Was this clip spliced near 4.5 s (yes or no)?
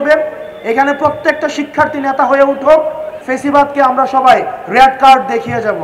no